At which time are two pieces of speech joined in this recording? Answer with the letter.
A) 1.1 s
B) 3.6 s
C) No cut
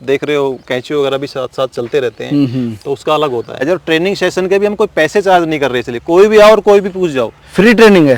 B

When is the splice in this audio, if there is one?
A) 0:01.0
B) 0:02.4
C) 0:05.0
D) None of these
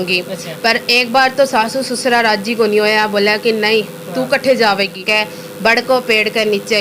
C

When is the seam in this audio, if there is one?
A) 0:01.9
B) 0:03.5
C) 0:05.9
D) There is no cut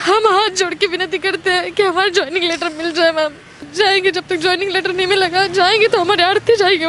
B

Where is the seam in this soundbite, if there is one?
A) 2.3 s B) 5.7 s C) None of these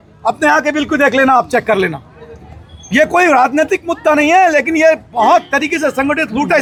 C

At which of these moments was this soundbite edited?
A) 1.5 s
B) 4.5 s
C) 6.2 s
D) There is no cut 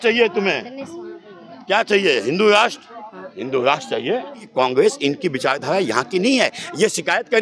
B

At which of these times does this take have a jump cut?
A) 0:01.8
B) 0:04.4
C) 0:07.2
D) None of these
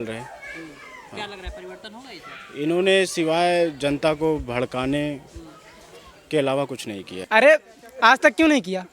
C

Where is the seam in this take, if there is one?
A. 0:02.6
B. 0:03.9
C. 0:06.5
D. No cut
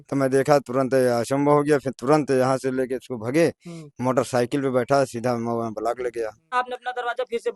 C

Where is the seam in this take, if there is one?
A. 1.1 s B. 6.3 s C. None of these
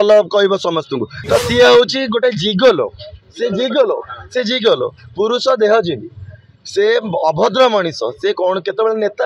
A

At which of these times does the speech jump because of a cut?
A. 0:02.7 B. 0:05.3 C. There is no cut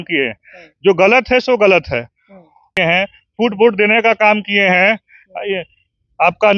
A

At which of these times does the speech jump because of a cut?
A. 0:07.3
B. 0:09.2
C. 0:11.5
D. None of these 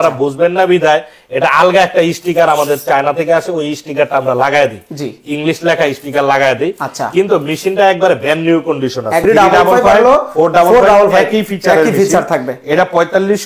B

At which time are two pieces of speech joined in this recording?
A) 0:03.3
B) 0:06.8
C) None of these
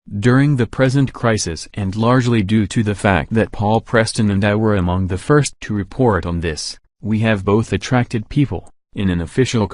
A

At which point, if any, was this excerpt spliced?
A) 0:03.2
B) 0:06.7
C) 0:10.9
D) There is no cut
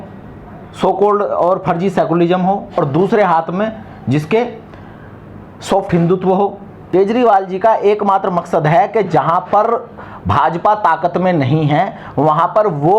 B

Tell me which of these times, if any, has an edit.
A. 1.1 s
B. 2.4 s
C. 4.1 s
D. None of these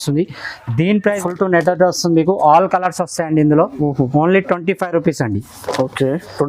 A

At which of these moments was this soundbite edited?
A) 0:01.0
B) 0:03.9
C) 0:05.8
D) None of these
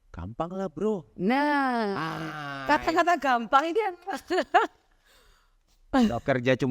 D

